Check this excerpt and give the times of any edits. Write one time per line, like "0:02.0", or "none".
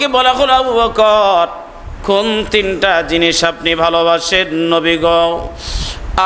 none